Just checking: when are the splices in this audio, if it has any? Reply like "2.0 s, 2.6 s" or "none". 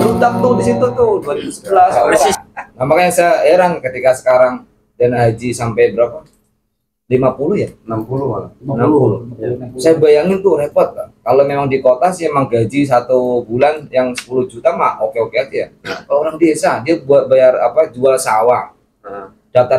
1.9 s